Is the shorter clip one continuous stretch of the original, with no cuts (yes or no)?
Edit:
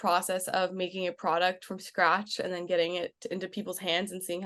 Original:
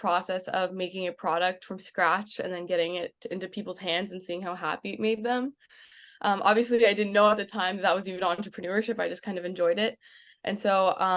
yes